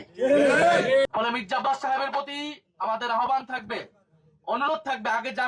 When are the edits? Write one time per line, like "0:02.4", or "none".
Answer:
0:01.1